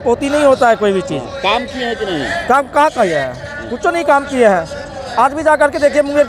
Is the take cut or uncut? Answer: uncut